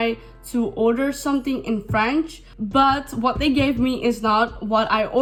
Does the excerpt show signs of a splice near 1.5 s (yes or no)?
no